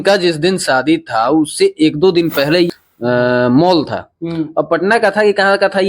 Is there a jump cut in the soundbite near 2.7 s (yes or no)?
yes